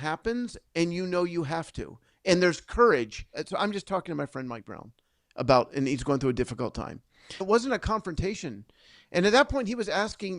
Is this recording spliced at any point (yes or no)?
yes